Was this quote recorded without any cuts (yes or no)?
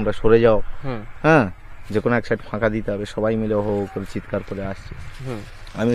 yes